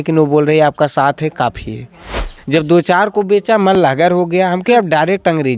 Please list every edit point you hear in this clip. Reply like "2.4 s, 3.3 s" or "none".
2.3 s

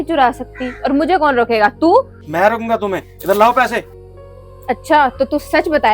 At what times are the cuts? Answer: 2.2 s, 4.0 s

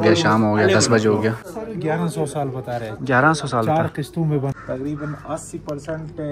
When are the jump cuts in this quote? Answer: 1.5 s, 4.5 s

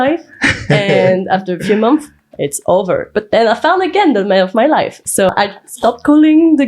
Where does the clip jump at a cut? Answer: 5.3 s

